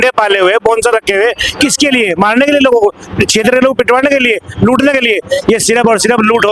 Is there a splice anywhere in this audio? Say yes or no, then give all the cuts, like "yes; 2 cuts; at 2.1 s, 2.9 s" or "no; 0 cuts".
no; 0 cuts